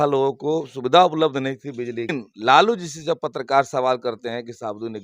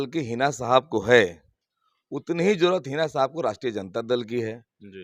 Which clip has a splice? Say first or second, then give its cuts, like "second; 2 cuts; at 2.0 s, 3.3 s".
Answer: first; 1 cut; at 2.2 s